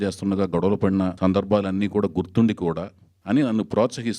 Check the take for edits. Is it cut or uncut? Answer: cut